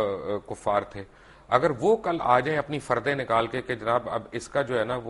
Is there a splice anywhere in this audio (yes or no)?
no